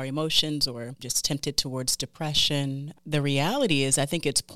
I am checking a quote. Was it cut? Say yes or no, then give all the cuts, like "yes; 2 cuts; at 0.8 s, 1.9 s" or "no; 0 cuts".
yes; 2 cuts; at 1.1 s, 2.9 s